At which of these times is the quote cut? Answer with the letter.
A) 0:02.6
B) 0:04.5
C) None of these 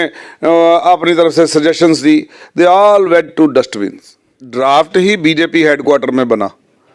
B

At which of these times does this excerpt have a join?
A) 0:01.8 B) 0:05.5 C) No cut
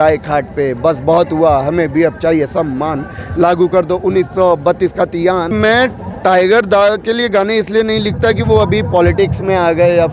B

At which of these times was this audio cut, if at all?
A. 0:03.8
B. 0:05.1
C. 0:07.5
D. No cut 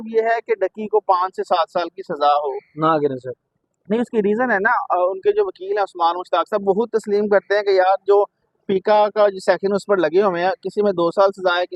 D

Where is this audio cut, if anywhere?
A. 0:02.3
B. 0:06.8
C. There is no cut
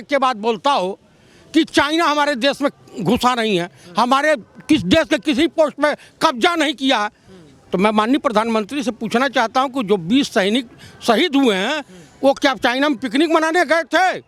C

